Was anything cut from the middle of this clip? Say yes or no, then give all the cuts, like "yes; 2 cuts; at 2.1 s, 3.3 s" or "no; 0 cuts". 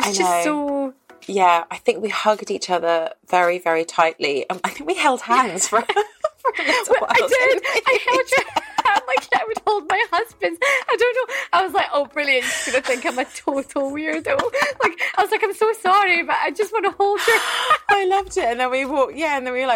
no; 0 cuts